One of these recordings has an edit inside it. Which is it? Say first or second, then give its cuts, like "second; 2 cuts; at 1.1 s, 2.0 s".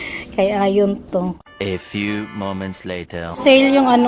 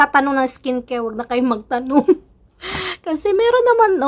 first; 2 cuts; at 1.5 s, 3.2 s